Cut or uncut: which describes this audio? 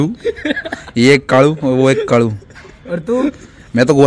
uncut